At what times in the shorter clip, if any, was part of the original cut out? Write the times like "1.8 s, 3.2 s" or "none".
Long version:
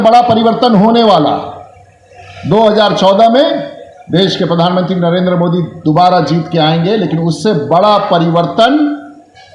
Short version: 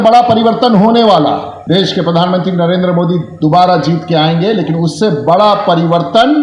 1.5 s